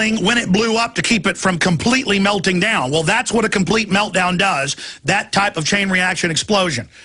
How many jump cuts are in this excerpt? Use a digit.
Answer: 1